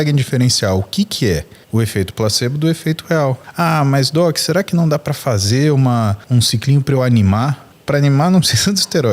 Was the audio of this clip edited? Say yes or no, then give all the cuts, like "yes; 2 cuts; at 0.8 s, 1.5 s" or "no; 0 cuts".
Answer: yes; 4 cuts; at 1.5 s, 3.4 s, 6.2 s, 7.7 s